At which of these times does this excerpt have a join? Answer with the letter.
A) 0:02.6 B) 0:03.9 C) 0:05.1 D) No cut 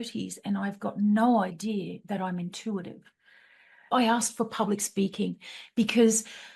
B